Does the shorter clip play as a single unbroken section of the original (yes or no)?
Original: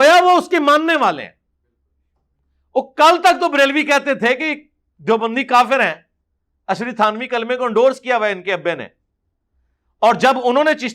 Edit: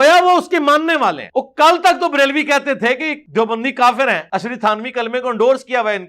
no